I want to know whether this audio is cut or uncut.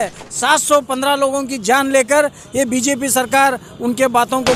uncut